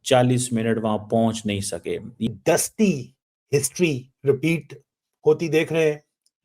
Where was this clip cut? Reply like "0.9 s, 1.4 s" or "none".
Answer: 2.3 s